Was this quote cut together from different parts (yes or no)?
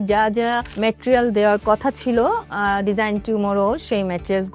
no